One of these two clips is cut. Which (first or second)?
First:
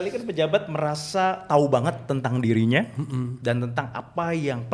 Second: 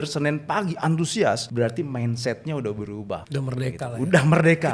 second